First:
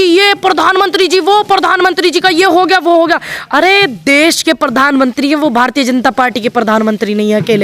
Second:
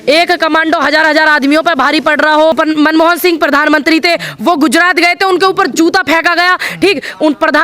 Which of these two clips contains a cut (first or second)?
second